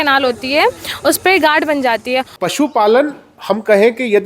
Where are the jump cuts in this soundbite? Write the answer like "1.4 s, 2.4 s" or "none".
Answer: 2.3 s